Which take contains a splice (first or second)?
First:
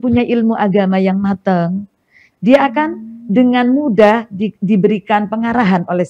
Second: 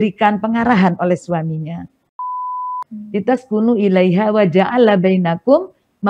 second